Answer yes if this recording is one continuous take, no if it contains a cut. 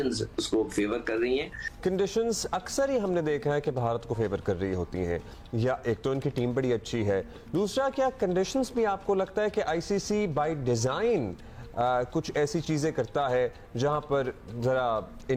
yes